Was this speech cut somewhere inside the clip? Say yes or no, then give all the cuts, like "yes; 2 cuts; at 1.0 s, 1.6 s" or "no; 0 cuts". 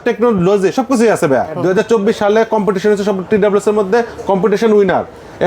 yes; 1 cut; at 1.6 s